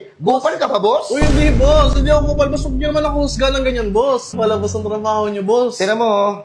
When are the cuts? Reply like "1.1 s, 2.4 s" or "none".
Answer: 4.3 s